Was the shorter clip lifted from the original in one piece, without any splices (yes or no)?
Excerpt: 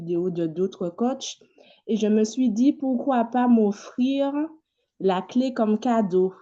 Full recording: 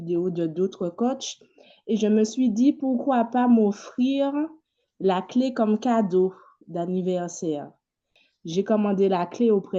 yes